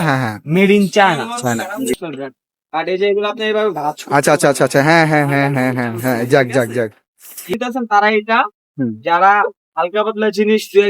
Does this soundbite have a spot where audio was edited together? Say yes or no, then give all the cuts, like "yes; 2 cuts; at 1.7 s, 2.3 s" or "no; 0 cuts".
yes; 2 cuts; at 1.9 s, 7.5 s